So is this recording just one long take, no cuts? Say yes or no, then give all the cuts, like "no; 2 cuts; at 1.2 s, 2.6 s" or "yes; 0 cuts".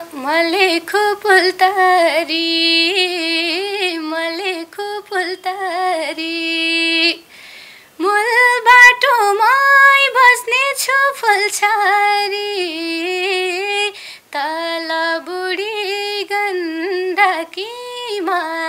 yes; 0 cuts